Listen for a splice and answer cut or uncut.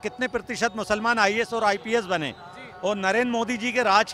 uncut